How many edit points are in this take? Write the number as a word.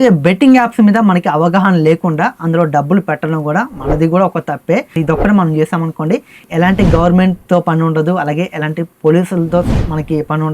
one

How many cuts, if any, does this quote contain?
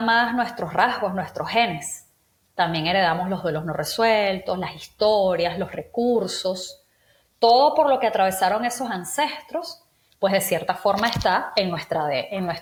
zero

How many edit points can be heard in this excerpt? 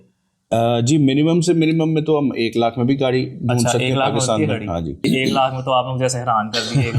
one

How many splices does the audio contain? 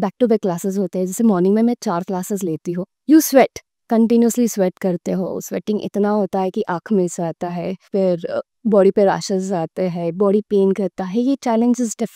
one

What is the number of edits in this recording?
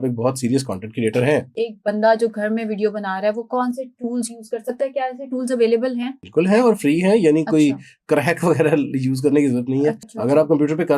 three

